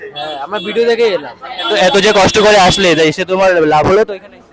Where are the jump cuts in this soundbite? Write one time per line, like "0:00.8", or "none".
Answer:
none